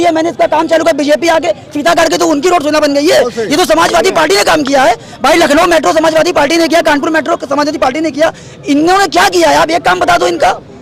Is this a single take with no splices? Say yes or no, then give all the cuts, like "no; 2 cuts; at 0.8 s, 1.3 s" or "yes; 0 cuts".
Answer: yes; 0 cuts